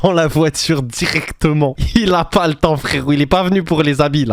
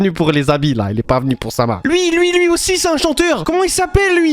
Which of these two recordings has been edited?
second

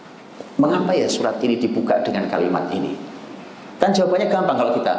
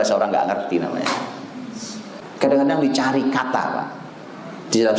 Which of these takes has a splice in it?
second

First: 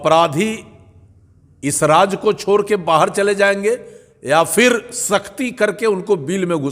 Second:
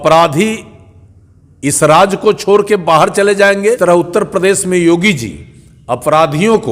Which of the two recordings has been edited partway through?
second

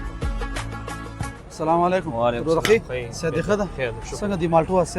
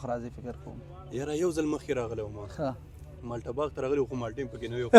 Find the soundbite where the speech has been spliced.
first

